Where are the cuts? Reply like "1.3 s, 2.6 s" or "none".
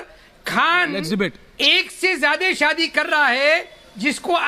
1.9 s